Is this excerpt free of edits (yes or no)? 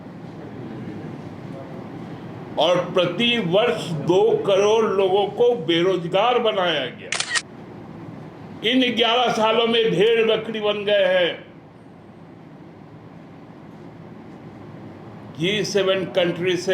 no